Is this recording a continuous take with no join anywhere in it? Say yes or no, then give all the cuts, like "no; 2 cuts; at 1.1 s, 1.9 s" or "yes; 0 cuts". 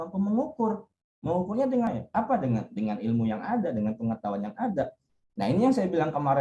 no; 1 cut; at 1.9 s